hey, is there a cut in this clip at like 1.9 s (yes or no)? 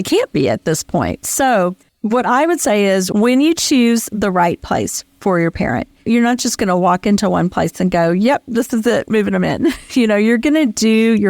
yes